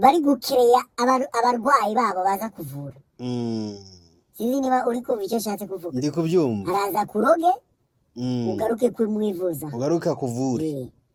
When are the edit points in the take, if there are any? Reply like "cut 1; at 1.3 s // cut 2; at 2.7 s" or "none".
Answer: none